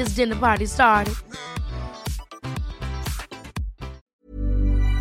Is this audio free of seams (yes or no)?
no